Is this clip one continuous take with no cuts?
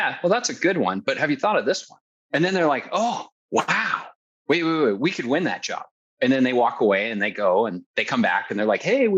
no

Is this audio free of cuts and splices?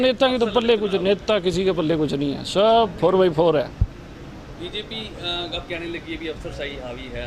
yes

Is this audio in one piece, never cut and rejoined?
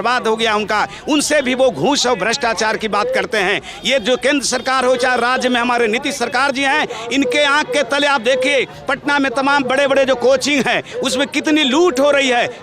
yes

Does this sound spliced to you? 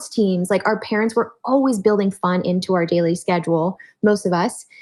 no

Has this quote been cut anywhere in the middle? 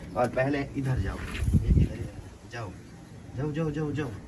no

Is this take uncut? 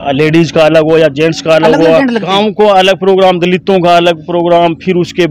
no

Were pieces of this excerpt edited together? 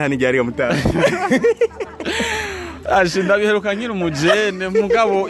no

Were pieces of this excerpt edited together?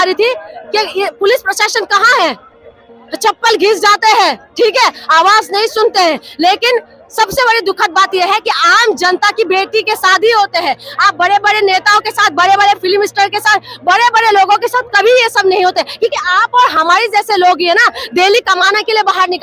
no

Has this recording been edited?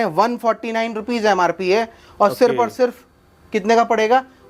no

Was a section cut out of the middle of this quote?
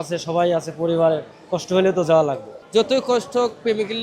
yes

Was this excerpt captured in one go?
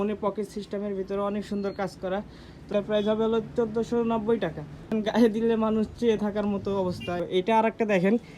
no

